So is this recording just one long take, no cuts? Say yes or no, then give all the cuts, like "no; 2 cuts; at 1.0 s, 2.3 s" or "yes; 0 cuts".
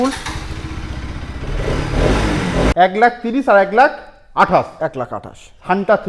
no; 1 cut; at 2.7 s